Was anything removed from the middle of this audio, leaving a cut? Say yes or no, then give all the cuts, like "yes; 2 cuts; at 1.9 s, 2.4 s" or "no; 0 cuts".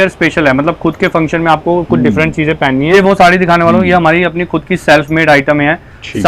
yes; 1 cut; at 2.9 s